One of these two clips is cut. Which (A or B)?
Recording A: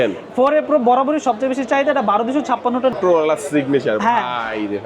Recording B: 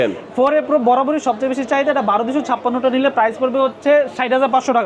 A